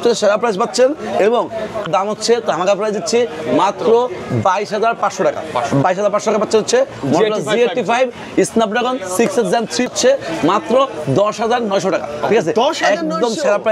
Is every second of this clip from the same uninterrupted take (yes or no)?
no